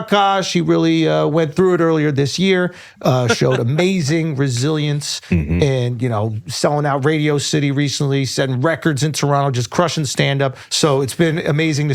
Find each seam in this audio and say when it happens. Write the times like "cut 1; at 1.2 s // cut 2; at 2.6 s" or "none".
cut 1; at 10.6 s